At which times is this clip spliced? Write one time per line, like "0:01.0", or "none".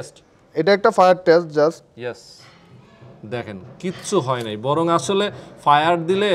none